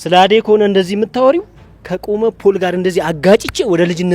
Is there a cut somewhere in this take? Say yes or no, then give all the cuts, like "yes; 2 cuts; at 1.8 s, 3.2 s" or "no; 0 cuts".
no; 0 cuts